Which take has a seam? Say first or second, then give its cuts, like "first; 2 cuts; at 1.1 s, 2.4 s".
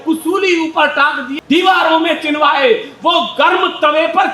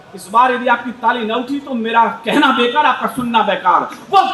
first; 1 cut; at 1.3 s